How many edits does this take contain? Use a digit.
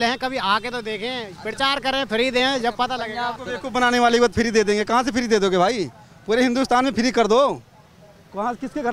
1